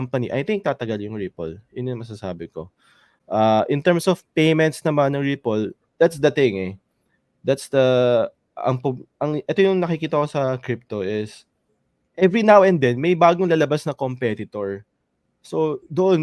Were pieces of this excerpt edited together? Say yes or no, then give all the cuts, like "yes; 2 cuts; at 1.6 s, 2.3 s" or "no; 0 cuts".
no; 0 cuts